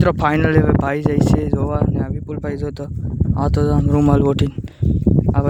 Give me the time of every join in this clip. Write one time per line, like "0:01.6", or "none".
none